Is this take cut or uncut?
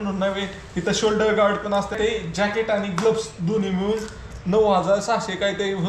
cut